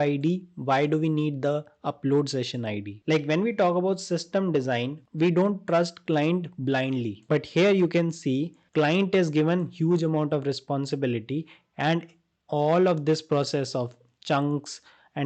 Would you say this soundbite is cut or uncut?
cut